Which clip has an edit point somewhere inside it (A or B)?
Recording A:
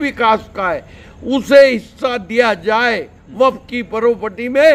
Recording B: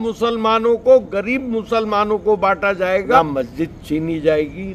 B